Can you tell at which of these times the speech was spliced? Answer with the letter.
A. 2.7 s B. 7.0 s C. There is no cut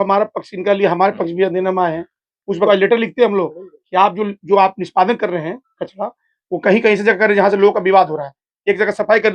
A